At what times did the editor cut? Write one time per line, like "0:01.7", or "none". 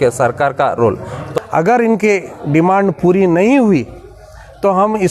0:01.2